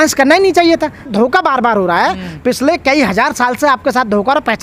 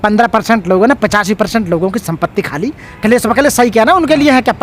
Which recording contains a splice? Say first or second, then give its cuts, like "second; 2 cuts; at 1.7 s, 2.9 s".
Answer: second; 1 cut; at 2.9 s